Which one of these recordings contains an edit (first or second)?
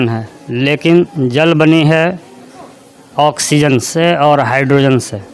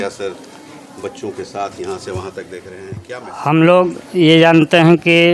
second